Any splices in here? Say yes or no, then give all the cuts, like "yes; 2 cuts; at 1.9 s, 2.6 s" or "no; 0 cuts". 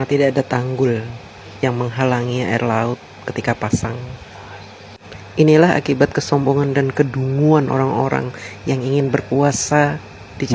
no; 0 cuts